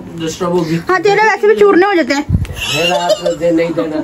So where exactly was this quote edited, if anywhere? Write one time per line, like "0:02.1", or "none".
0:02.8